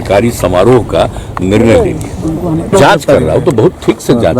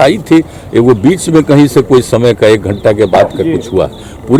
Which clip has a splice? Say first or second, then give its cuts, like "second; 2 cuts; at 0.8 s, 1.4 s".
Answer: first; 1 cut; at 2.7 s